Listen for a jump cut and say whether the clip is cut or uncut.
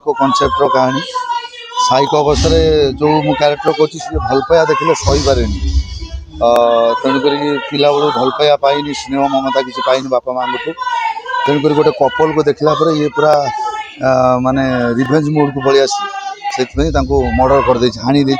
uncut